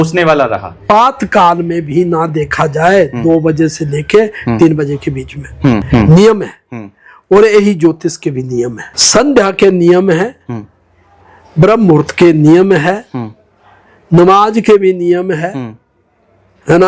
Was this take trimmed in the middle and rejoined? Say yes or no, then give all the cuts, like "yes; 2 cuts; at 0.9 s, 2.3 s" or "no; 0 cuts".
yes; 3 cuts; at 0.8 s, 5.8 s, 8.9 s